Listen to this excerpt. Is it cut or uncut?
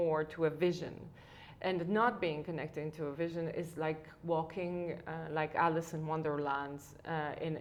uncut